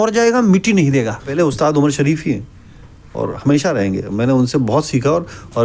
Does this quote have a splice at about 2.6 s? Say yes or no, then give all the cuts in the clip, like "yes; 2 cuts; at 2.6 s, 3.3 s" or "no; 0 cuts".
no; 1 cut; at 1.4 s